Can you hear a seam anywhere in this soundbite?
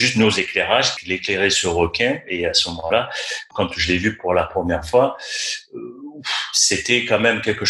no; 0 cuts

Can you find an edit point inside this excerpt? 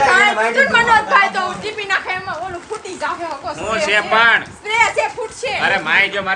no; 0 cuts

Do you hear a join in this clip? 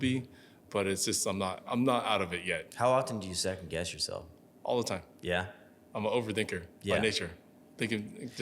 yes; 1 cut; at 1.6 s

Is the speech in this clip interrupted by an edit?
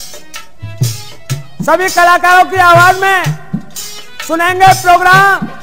no; 0 cuts

